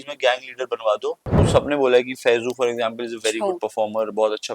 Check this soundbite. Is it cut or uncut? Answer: cut